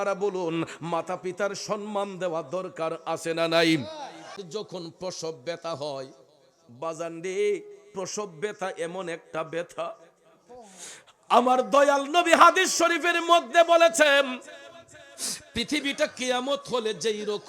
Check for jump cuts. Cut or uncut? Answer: cut